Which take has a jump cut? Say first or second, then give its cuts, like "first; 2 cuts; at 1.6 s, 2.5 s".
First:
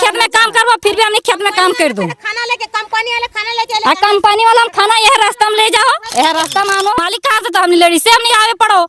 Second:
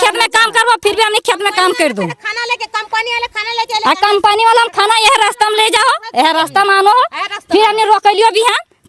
first; 1 cut; at 7.0 s